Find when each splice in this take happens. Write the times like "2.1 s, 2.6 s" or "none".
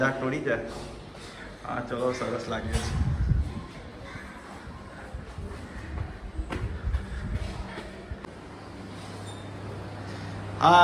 none